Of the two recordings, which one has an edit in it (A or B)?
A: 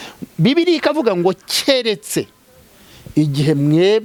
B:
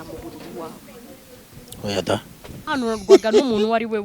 B